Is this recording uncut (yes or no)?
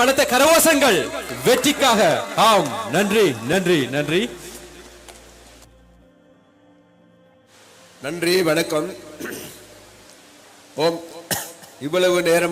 no